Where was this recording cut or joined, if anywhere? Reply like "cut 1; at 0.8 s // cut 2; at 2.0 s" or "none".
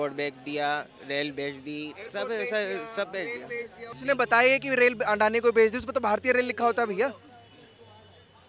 cut 1; at 3.8 s